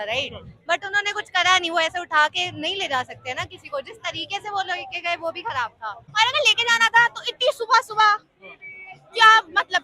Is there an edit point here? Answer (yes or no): yes